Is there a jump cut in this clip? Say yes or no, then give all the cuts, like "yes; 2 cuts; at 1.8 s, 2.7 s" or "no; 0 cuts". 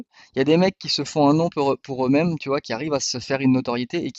no; 0 cuts